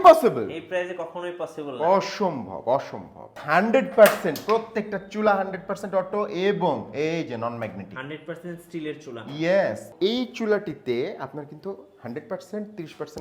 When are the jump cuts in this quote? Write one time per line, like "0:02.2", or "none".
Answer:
0:03.4
0:09.9